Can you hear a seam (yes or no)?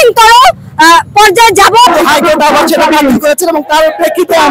yes